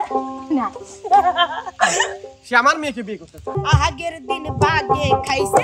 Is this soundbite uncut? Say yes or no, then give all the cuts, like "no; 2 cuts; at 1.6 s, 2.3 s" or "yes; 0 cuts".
no; 1 cut; at 3.6 s